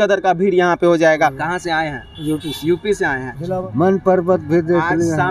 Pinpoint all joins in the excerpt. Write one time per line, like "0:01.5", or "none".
0:01.5
0:03.7